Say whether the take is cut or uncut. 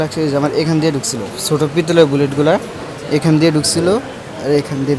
uncut